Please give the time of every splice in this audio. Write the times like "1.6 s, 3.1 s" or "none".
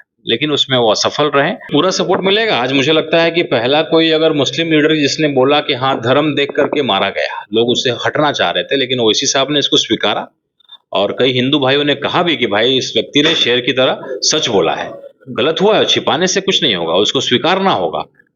1.7 s